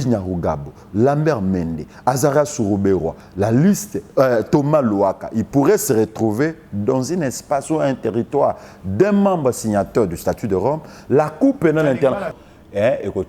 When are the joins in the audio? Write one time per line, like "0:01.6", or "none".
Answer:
0:12.3